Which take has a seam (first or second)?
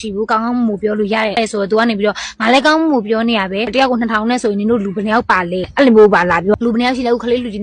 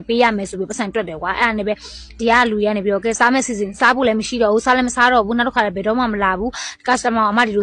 first